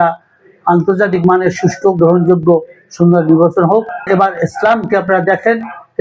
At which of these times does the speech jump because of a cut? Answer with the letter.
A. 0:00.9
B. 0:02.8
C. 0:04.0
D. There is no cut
C